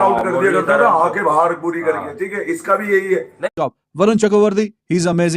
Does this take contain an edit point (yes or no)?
yes